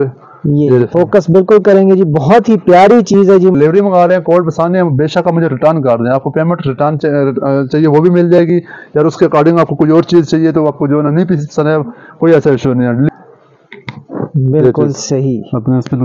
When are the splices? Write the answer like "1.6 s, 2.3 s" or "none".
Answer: 3.5 s, 13.1 s